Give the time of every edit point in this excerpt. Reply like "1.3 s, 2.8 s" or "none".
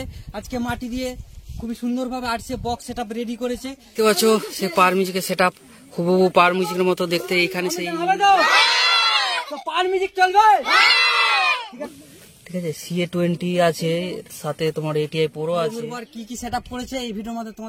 3.9 s, 7.8 s, 11.9 s, 16.0 s

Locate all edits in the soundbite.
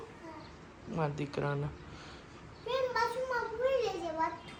none

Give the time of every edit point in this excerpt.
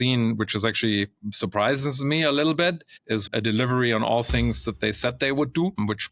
3.3 s

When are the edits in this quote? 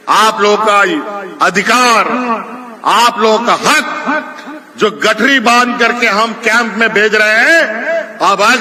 none

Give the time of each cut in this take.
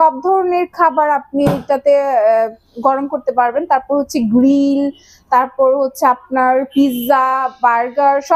none

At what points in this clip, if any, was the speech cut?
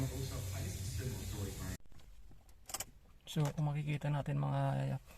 1.8 s

